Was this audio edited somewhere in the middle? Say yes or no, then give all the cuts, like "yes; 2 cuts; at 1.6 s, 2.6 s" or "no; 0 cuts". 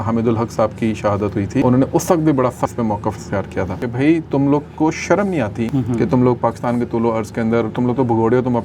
yes; 4 cuts; at 1.6 s, 2.7 s, 3.8 s, 5.7 s